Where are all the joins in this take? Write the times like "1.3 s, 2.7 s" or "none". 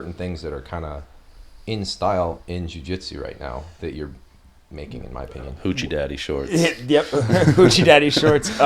none